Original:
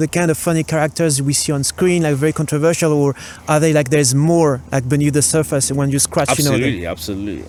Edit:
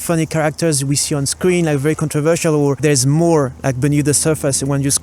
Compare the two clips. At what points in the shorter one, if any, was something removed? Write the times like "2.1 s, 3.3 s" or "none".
2.8 s